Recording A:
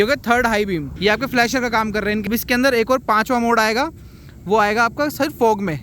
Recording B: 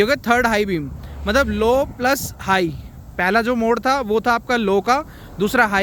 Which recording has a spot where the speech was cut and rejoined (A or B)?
A